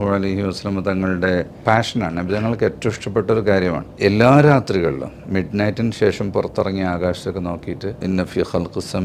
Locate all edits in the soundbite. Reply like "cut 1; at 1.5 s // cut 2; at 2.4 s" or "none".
cut 1; at 1.6 s // cut 2; at 3.9 s // cut 3; at 8.0 s